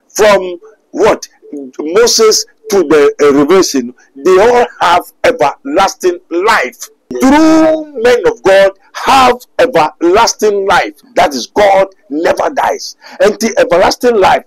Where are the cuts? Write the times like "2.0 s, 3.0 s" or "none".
7.1 s, 11.0 s

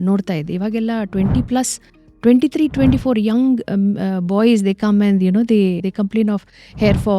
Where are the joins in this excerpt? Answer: 5.8 s

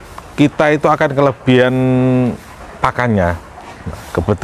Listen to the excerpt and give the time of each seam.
none

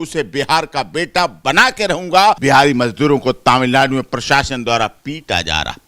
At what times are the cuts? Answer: 2.4 s

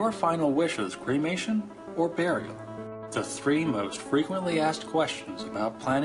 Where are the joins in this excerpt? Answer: none

